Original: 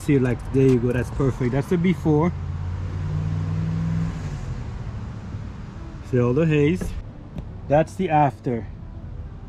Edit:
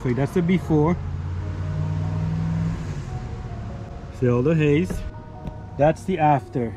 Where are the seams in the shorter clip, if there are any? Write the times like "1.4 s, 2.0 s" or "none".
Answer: 3.9 s